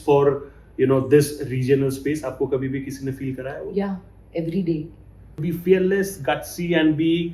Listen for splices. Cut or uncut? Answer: cut